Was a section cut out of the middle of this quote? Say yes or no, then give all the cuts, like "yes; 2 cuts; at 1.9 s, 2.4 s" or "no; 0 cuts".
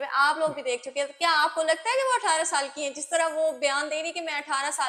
no; 0 cuts